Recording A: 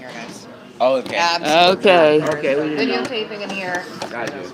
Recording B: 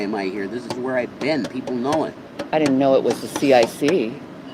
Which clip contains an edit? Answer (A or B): B